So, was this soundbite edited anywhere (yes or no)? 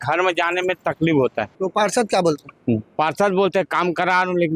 yes